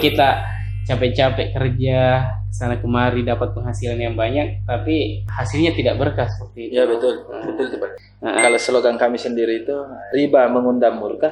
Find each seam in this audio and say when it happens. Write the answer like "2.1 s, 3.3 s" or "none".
7.9 s